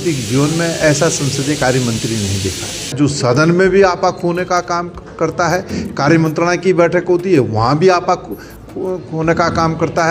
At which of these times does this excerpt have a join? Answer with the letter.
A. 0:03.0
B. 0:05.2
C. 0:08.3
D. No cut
A